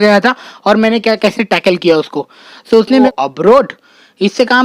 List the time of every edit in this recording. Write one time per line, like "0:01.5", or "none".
0:03.1